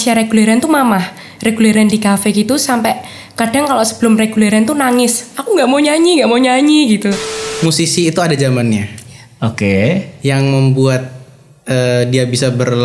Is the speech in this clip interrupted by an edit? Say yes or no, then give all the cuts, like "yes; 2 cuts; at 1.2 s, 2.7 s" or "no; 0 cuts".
yes; 1 cut; at 7.2 s